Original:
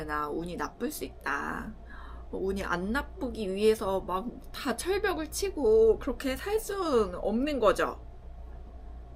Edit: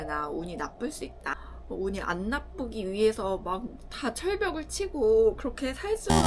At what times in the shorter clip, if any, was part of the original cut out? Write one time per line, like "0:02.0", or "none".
0:01.4